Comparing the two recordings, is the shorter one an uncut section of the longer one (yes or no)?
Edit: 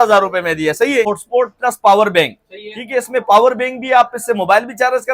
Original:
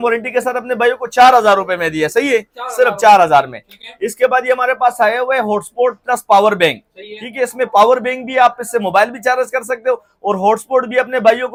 no